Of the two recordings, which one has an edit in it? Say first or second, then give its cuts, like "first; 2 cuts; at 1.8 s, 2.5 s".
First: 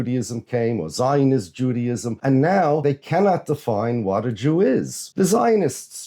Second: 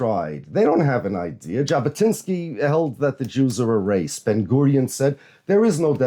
first; 3 cuts; at 2.1 s, 2.8 s, 5.0 s